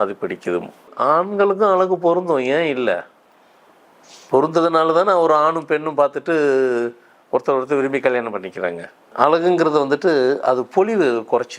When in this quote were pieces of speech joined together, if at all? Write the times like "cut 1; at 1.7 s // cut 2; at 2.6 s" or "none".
cut 1; at 0.9 s // cut 2; at 9.1 s